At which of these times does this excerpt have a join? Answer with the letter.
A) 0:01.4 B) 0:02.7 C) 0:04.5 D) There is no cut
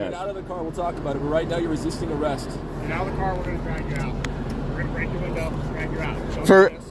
B